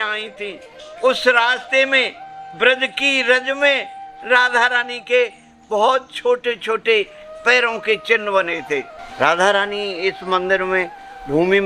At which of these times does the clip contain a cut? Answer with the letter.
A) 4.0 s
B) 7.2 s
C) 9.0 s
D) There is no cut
C